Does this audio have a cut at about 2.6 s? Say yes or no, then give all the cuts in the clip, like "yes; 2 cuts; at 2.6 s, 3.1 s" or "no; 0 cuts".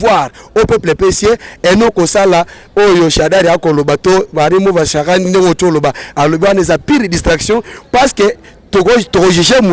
no; 0 cuts